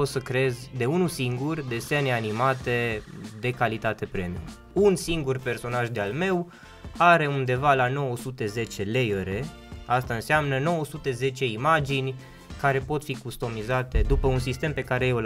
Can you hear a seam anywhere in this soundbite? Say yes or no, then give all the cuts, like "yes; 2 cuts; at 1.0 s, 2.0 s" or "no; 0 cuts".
yes; 1 cut; at 4.7 s